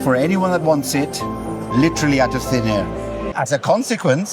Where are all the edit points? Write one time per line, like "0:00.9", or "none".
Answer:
0:03.3